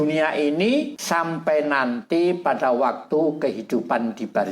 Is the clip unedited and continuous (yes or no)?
no